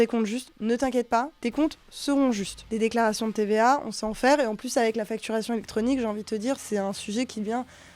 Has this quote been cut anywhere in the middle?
yes; 3 cuts; at 1.4 s, 2.6 s, 6.6 s

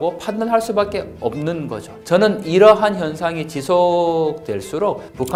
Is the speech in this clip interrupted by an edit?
no; 0 cuts

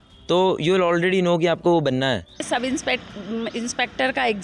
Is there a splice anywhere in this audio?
yes; 1 cut; at 2.4 s

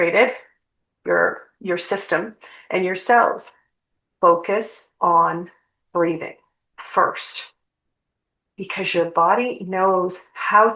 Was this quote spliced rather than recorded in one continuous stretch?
no; 0 cuts

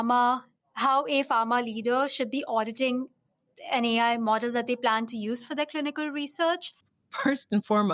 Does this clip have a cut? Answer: yes; 1 cut; at 7.0 s

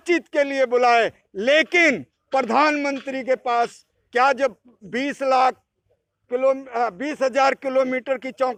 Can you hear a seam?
no; 0 cuts

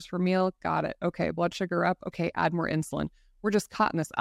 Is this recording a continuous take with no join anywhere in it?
yes; 0 cuts

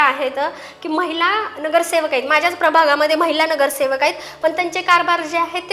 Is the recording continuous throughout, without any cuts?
yes; 0 cuts

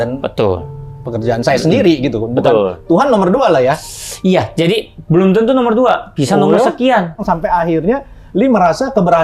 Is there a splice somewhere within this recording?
yes; 1 cut; at 7.2 s

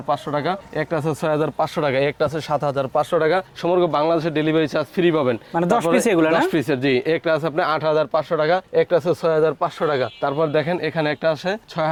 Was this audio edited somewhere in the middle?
no; 0 cuts

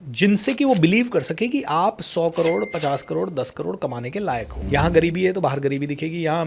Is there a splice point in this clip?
yes; 1 cut; at 4.6 s

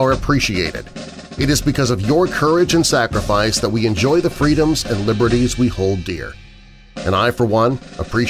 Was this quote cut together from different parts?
no; 0 cuts

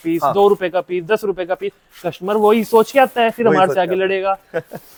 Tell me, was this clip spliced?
no; 0 cuts

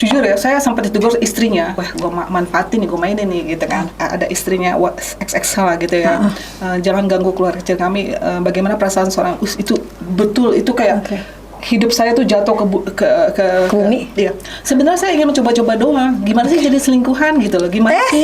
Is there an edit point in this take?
yes; 2 cuts; at 1.8 s, 3.9 s

